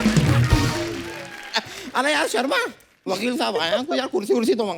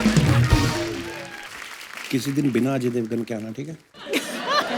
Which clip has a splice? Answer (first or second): second